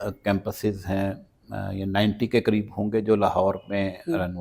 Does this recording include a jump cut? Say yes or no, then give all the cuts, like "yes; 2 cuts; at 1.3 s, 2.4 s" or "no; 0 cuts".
no; 0 cuts